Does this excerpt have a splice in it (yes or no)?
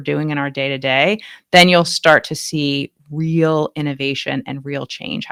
no